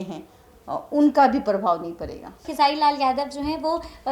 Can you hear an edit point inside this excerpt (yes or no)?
yes